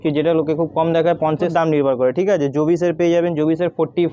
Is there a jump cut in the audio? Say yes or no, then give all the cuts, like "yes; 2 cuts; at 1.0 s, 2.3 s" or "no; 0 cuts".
yes; 1 cut; at 1.5 s